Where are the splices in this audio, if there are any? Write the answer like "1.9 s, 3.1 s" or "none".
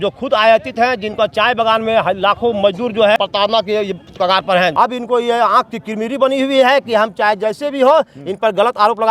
3.2 s, 4.7 s